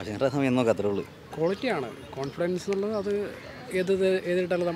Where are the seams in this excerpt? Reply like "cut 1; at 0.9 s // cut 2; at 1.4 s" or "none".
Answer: cut 1; at 1.2 s

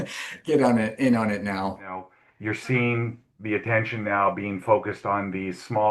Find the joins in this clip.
cut 1; at 2.1 s

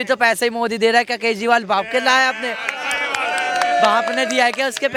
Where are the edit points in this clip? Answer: none

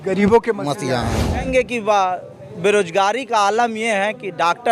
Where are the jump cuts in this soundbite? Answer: cut 1; at 1.4 s

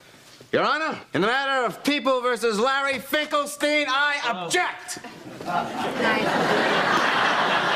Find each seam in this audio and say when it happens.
cut 1; at 0.9 s

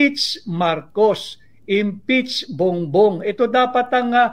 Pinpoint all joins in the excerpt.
none

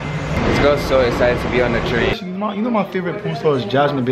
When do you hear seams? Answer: cut 1; at 2.1 s

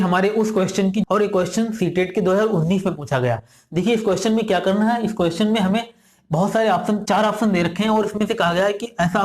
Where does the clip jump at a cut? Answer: cut 1; at 1.0 s

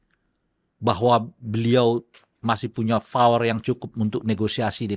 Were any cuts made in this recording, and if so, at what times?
none

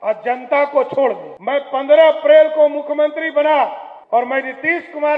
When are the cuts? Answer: cut 1; at 1.3 s // cut 2; at 3.9 s

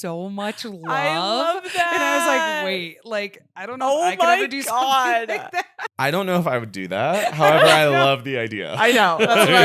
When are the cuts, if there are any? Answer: cut 1; at 5.9 s

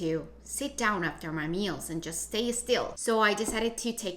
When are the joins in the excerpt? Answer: cut 1; at 2.9 s

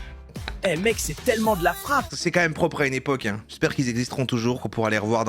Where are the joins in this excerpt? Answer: cut 1; at 2.1 s

